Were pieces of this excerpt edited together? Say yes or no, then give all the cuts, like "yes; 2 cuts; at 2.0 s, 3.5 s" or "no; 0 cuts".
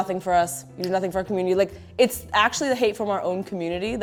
no; 0 cuts